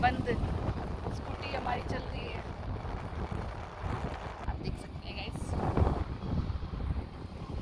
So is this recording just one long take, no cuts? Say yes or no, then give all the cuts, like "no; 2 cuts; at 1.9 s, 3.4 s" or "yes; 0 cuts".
yes; 0 cuts